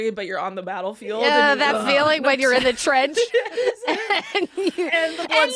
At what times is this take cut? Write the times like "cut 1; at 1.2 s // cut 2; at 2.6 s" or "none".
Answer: none